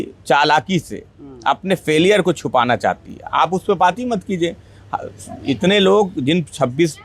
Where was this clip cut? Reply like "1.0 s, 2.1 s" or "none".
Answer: none